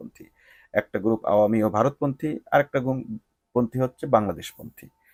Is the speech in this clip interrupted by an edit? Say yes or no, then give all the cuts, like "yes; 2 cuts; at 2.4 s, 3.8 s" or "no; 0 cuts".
no; 0 cuts